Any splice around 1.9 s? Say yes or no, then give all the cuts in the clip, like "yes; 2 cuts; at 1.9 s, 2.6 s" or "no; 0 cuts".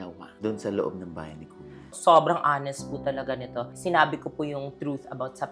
yes; 2 cuts; at 1.9 s, 3.7 s